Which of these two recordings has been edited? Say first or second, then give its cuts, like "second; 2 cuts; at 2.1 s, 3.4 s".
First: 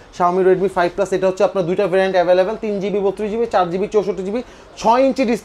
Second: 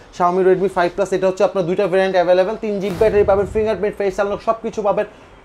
second; 1 cut; at 2.9 s